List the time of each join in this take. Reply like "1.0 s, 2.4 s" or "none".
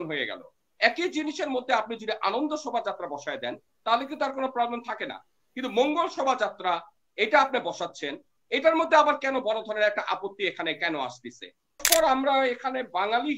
11.8 s